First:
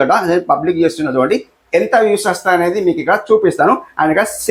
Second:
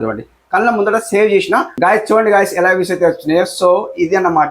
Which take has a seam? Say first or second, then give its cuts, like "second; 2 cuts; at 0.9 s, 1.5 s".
second; 1 cut; at 1.7 s